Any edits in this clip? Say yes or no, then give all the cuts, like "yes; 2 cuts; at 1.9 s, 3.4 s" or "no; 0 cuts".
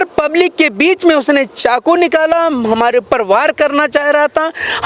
no; 0 cuts